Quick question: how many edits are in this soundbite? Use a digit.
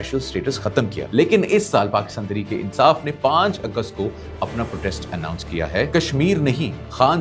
2